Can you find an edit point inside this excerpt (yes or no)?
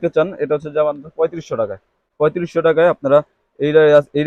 no